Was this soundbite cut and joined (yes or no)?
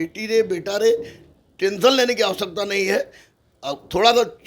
no